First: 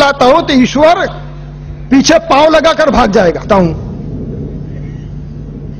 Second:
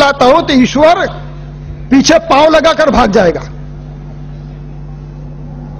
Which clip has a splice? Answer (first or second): second